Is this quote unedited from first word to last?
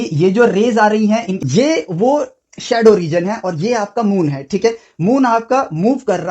no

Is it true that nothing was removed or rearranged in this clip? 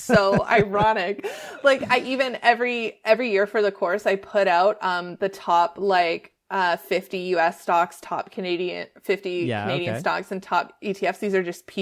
yes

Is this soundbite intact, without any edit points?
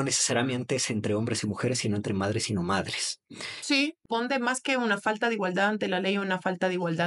no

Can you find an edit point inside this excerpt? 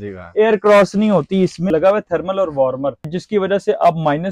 yes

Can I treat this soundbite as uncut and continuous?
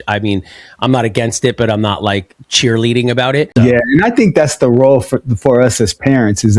no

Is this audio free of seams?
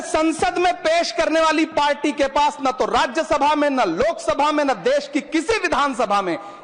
yes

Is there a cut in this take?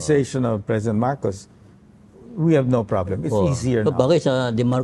no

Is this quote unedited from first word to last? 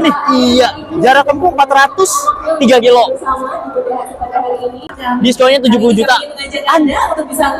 no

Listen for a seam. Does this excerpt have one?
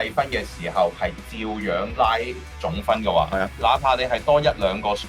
no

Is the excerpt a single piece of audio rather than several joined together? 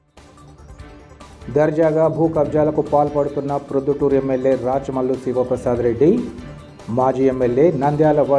no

